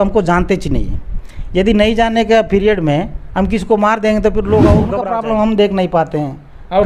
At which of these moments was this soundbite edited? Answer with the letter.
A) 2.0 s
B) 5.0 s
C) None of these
B